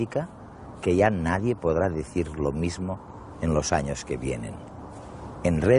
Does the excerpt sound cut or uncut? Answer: uncut